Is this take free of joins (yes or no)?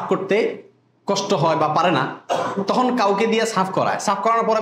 yes